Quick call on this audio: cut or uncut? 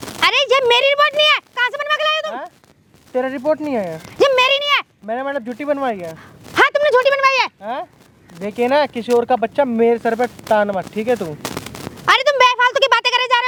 uncut